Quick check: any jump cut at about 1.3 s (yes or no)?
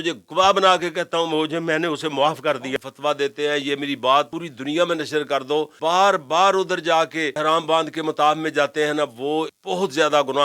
no